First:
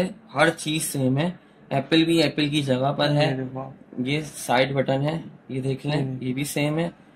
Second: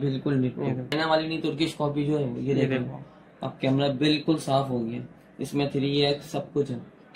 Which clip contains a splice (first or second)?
second